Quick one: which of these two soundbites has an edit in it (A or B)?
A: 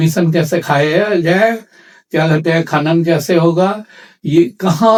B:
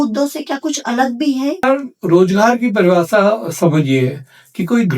B